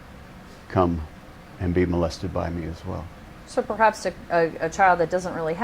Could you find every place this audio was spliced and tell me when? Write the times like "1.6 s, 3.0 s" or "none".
3.7 s